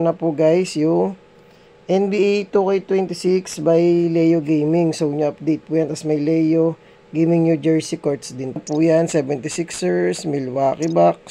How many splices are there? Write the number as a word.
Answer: one